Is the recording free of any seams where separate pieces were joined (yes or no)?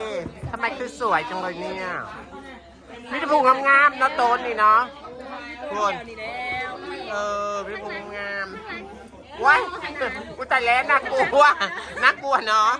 yes